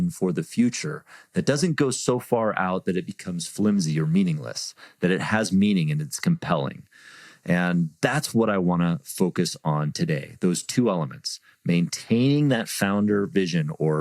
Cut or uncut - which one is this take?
uncut